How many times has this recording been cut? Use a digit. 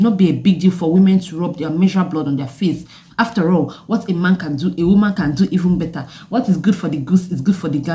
0